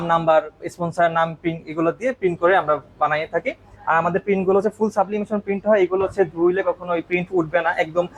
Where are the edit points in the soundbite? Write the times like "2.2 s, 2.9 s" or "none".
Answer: none